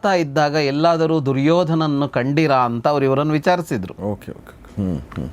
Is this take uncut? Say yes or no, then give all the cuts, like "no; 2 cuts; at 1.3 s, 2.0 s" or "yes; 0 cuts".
yes; 0 cuts